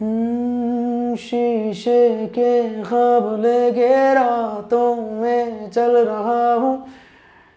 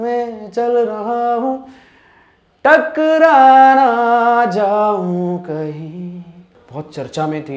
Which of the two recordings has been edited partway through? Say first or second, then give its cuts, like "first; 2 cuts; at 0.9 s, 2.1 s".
second; 1 cut; at 6.6 s